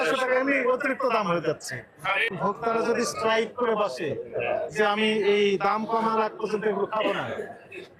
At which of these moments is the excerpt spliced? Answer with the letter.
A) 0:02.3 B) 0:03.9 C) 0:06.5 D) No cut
A